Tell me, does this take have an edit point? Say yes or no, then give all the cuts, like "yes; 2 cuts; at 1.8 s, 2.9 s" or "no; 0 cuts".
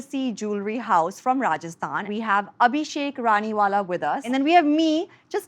yes; 2 cuts; at 2.1 s, 4.2 s